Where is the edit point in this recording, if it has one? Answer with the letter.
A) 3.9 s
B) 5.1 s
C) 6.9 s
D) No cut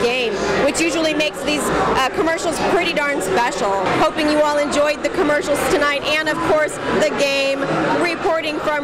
A